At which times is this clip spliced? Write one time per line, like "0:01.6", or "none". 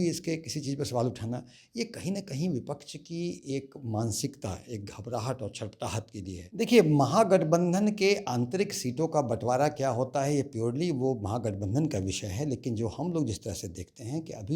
0:06.4

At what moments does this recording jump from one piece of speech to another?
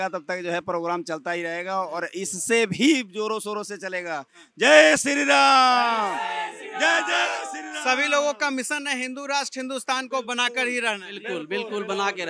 none

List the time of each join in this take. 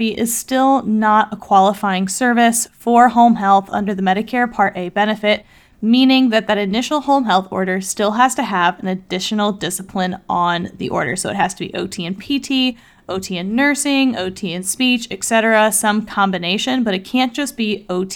none

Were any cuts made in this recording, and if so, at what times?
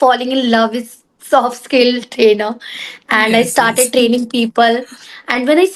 none

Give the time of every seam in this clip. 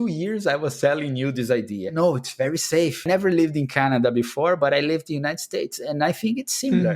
0:01.9
0:03.0

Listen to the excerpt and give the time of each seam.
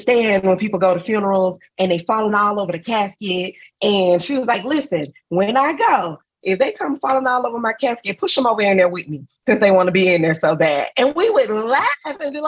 0:06.4

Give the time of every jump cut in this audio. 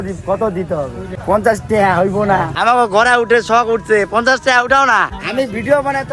0:01.1
0:02.5
0:05.2

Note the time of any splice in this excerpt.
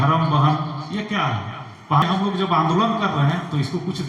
0:02.0

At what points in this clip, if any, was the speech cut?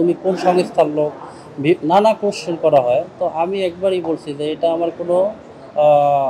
none

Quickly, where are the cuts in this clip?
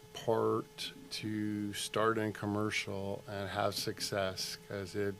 none

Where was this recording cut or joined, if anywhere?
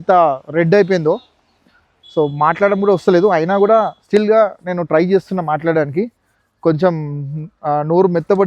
none

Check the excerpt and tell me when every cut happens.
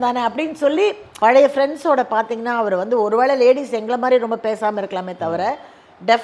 0:01.1

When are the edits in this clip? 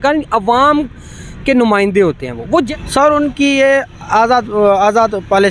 0:02.5

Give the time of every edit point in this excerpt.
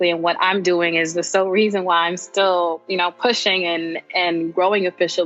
none

